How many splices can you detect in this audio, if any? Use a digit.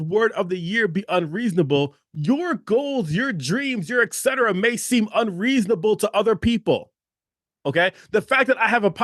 1